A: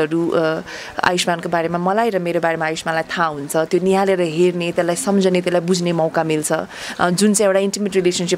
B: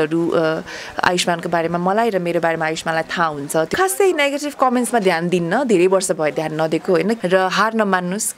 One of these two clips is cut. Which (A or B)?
B